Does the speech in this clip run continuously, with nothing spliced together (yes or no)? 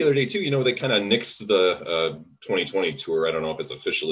yes